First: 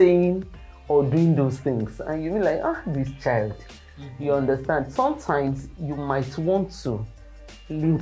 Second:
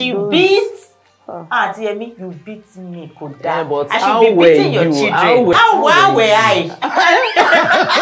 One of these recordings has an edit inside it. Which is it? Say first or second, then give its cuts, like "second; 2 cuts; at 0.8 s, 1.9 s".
second; 1 cut; at 5.5 s